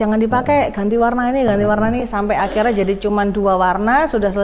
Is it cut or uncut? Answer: uncut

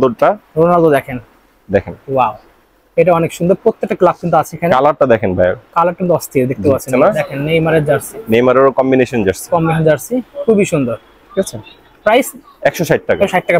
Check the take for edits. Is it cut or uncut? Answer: cut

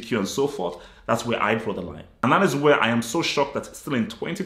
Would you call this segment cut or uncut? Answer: cut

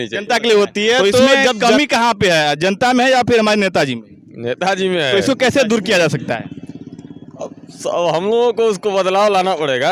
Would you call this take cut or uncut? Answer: cut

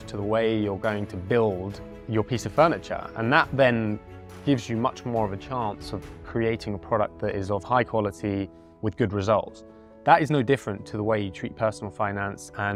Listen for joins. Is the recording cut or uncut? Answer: uncut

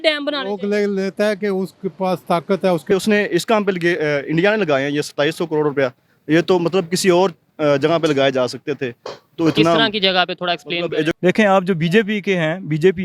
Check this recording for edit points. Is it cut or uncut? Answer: cut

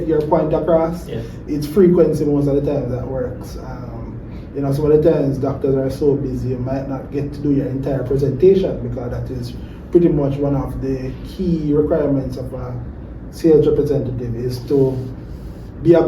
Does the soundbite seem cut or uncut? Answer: uncut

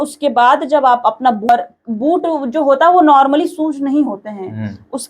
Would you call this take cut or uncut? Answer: cut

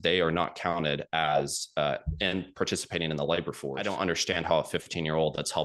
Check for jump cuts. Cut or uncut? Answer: cut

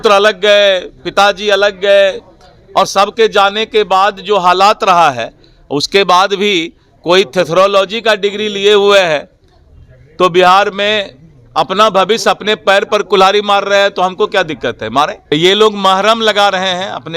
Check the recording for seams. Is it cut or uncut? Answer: cut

